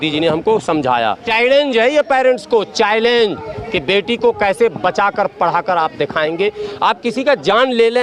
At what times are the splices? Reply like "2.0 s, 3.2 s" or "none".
1.2 s, 6.6 s